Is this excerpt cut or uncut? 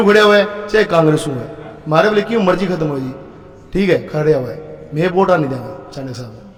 uncut